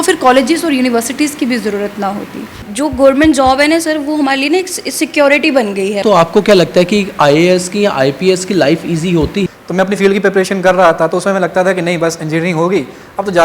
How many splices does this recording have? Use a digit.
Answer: 3